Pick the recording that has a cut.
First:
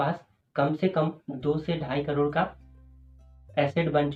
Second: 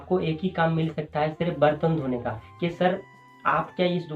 second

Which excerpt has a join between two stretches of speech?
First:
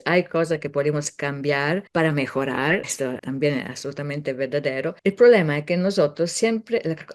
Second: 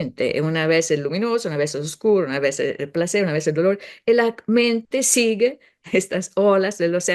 first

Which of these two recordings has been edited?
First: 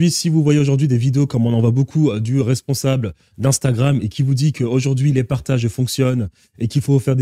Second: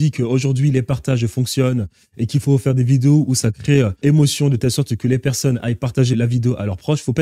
second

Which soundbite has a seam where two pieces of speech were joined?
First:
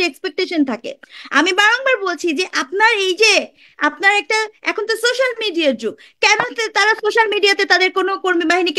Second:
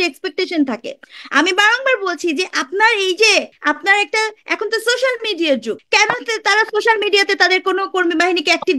second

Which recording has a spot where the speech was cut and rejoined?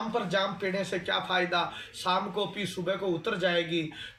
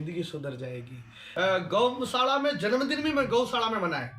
second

